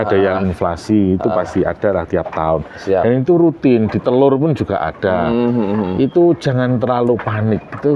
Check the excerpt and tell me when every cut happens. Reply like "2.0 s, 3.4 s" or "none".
none